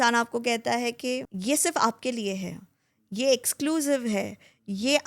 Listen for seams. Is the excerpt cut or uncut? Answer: cut